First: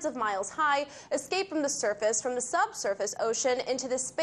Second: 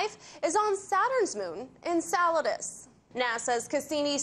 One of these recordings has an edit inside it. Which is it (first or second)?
second